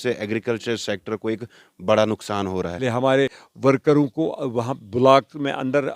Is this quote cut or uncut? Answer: cut